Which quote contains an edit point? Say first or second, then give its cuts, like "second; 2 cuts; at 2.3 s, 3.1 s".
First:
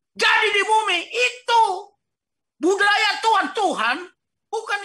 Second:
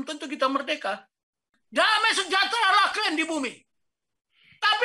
second; 1 cut; at 1.6 s